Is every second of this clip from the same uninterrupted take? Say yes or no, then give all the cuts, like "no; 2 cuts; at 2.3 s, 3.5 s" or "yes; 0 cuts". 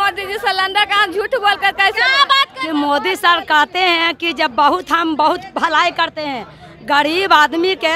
no; 1 cut; at 2.5 s